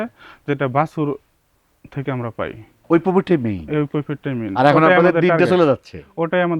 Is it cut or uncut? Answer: uncut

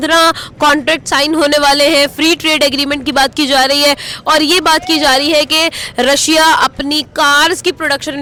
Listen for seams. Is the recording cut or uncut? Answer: uncut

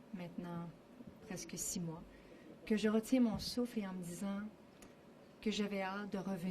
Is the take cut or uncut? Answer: cut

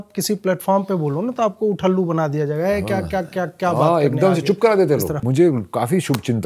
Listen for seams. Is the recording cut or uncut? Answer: cut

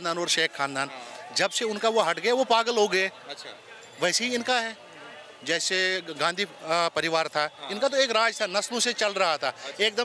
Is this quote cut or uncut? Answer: uncut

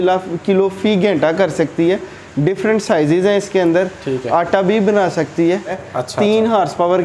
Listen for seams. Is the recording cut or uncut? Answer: cut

